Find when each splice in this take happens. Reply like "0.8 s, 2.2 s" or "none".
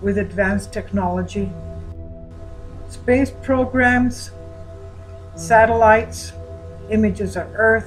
none